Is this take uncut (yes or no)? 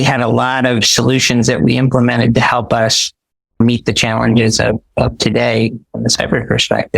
no